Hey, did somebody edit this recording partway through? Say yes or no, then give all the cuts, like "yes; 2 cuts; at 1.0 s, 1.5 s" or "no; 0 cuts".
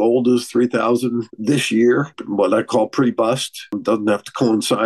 yes; 3 cuts; at 1.3 s, 2.2 s, 3.8 s